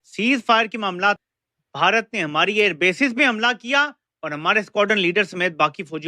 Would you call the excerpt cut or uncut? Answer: cut